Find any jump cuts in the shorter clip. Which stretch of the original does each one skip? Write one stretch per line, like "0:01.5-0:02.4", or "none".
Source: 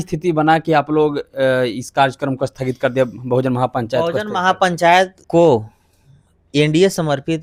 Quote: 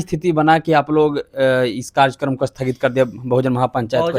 none